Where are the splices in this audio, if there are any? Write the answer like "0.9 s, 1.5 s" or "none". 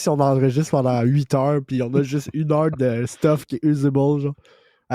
none

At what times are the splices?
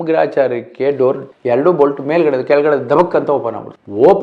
1.3 s

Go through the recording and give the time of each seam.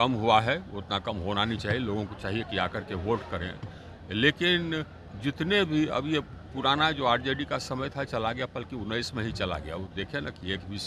none

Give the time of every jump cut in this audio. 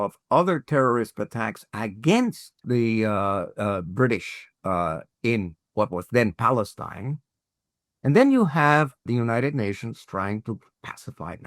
2.6 s, 5.6 s, 9.0 s

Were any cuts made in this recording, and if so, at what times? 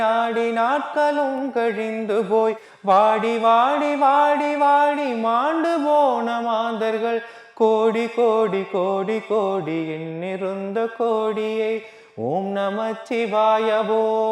none

